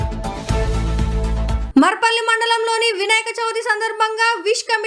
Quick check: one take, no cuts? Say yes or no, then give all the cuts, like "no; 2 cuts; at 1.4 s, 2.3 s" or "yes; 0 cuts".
no; 1 cut; at 1.6 s